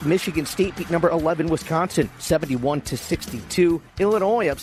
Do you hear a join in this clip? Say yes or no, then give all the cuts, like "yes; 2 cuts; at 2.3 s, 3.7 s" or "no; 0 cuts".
no; 0 cuts